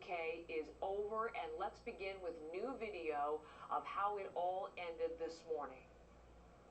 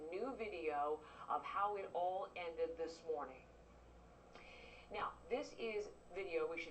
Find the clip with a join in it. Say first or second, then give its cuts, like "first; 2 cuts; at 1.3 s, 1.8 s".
second; 1 cut; at 5.6 s